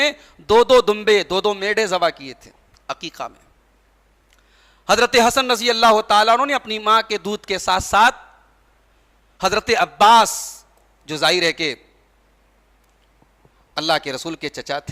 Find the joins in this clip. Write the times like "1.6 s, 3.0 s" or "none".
none